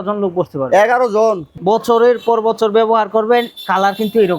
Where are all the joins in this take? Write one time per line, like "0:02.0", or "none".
0:01.5